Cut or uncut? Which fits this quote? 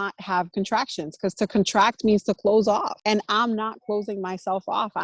cut